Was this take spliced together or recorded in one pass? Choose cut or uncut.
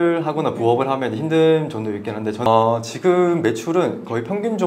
cut